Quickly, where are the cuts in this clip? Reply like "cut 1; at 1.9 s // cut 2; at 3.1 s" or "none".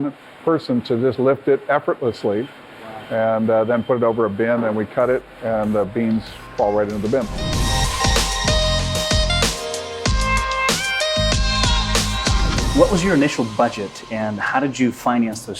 none